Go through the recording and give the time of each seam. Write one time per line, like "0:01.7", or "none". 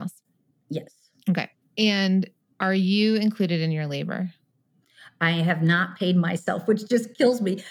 0:01.6
0:02.4